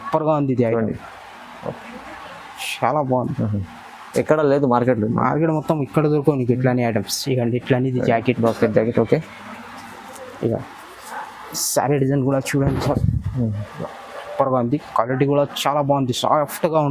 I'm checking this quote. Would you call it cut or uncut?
uncut